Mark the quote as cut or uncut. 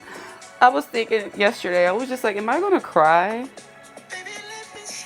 uncut